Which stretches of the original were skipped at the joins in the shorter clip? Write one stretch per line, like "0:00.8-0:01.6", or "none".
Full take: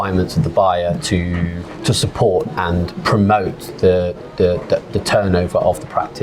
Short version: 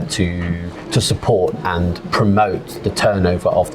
0:03.7-0:04.9